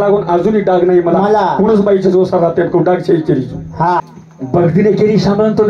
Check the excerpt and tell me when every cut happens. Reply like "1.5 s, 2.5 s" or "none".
4.0 s